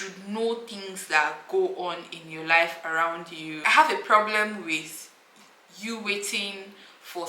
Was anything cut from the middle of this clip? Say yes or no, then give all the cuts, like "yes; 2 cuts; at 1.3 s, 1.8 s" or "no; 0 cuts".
yes; 1 cut; at 3.6 s